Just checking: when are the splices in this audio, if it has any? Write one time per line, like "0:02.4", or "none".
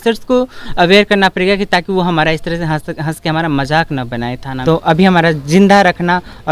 0:04.5